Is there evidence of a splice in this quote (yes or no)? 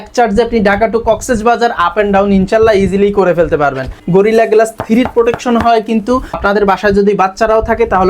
yes